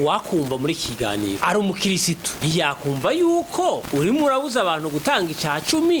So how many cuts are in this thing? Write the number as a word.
zero